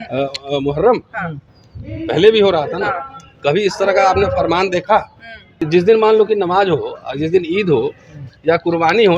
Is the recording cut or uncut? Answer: cut